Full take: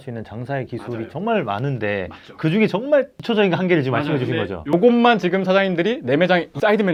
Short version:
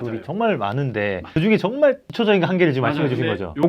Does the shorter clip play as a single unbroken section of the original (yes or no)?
no